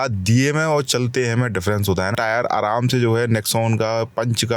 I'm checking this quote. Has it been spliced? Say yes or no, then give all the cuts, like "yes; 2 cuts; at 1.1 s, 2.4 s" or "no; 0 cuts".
yes; 1 cut; at 2.1 s